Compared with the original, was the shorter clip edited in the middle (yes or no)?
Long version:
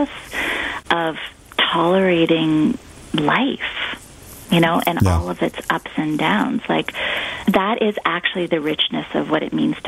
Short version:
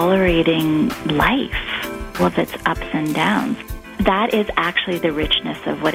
yes